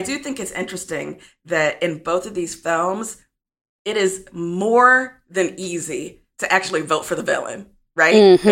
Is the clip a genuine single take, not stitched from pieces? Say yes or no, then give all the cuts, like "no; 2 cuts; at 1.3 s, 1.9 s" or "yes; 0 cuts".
yes; 0 cuts